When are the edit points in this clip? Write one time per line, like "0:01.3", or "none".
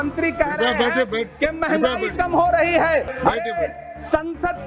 0:03.1